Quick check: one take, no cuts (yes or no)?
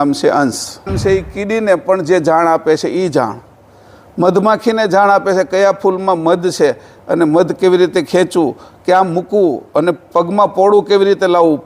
no